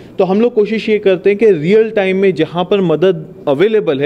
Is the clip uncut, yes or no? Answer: yes